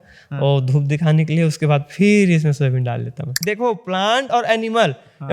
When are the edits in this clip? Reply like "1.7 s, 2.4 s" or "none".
3.4 s